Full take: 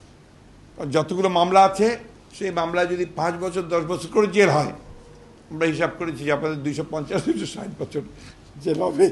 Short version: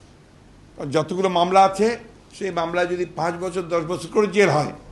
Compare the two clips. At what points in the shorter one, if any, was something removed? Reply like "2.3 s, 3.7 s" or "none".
none